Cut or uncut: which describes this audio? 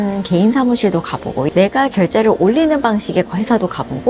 cut